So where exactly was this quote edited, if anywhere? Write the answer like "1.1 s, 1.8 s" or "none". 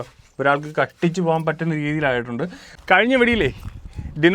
2.7 s